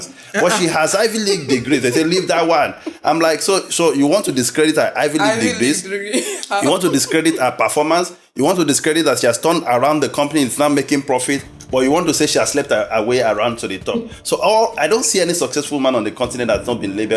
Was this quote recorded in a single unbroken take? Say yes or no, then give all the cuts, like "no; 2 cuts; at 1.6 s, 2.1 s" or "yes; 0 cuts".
yes; 0 cuts